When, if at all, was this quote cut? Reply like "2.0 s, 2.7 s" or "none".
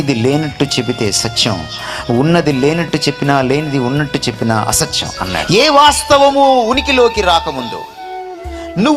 5.4 s

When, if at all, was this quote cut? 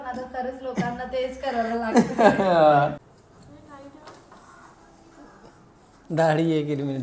3.1 s

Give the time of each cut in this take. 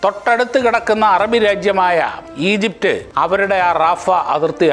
2.2 s, 3.1 s

